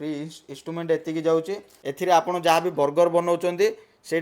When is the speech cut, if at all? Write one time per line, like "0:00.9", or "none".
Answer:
0:01.8

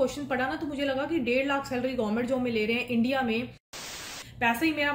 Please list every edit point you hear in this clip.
0:03.9

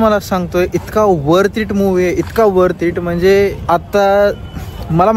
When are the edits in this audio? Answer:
none

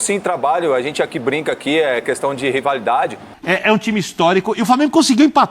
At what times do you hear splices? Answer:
0:03.3

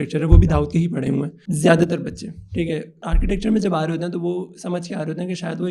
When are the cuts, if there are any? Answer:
0:01.4
0:03.0

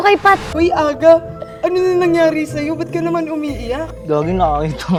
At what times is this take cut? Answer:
none

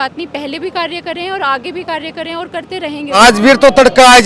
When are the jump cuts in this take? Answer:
0:03.2

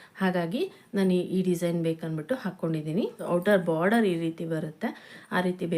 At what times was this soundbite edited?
0:03.3

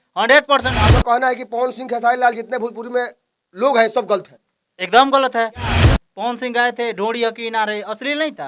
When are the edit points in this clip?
0:00.9
0:05.8

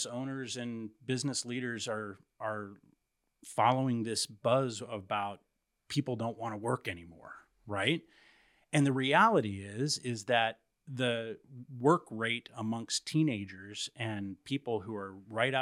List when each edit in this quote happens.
none

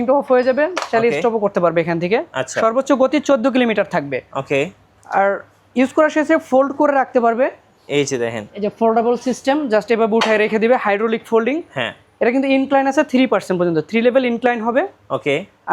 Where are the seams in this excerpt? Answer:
none

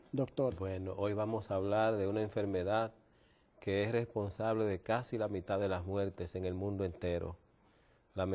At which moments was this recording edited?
0:04.9

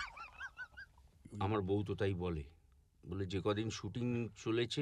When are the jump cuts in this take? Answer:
0:01.3

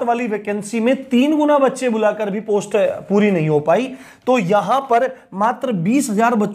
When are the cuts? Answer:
none

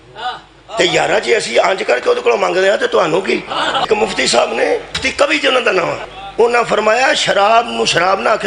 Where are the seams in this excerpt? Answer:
0:03.9
0:05.1
0:06.0

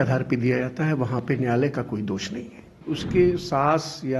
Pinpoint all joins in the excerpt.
0:02.8

